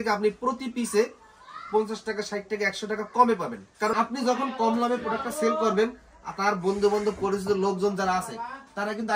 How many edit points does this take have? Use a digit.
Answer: 1